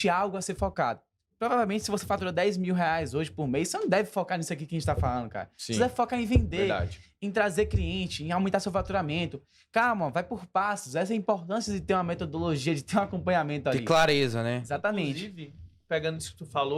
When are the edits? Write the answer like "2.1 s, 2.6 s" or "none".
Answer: none